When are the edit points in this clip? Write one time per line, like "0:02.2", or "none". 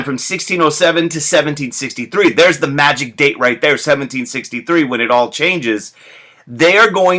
none